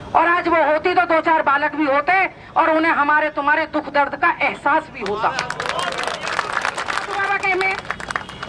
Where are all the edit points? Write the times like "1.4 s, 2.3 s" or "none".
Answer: 7.1 s